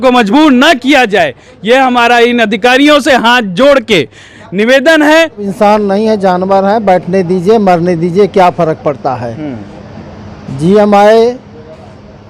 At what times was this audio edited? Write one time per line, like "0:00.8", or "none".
0:05.5